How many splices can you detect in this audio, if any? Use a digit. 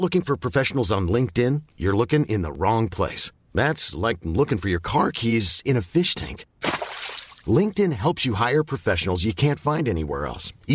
0